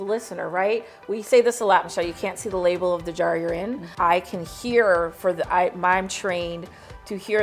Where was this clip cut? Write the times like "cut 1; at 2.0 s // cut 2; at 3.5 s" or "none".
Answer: cut 1; at 3.8 s